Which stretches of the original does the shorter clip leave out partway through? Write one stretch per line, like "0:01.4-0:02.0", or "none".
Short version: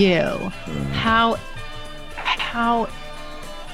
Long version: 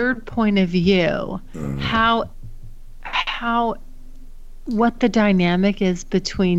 none